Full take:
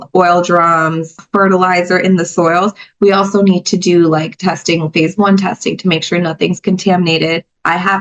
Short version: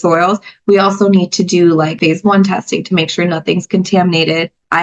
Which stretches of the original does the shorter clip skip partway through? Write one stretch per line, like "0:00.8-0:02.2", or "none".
0:04.3-0:04.9